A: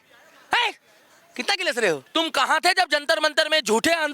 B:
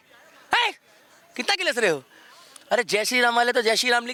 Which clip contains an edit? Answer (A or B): A